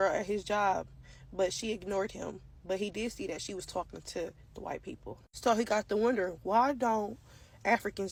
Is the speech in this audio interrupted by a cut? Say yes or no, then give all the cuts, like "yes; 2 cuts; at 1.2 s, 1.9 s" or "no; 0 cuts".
no; 0 cuts